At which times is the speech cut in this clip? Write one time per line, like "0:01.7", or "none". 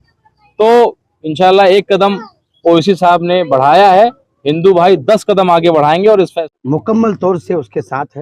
0:06.4